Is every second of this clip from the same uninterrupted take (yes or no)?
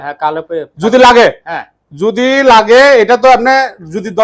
yes